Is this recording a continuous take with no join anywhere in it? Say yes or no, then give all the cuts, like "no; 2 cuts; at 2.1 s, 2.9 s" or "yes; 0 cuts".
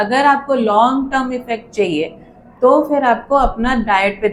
yes; 0 cuts